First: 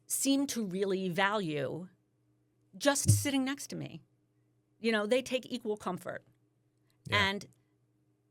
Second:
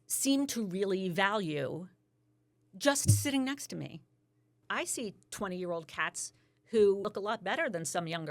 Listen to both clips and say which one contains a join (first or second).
second